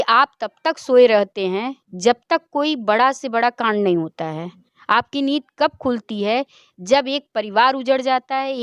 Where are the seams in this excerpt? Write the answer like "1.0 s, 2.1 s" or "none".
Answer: none